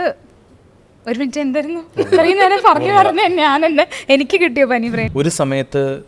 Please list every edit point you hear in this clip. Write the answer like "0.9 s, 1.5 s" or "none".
5.0 s